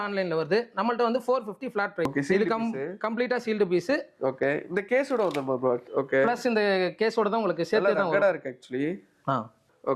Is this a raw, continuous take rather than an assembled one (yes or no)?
yes